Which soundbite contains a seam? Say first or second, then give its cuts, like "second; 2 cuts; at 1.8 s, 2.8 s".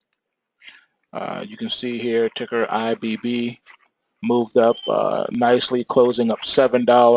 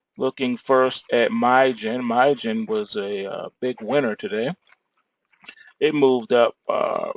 second; 1 cut; at 1.2 s